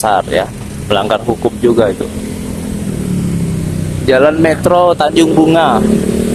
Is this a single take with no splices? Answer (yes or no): yes